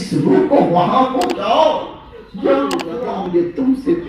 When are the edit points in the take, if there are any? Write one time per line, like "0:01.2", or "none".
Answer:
0:02.9